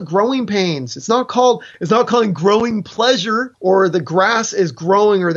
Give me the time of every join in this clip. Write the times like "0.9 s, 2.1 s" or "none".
1.7 s, 3.5 s